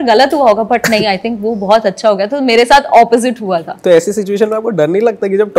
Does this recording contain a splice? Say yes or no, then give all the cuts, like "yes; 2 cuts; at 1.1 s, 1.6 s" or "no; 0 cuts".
yes; 1 cut; at 3.7 s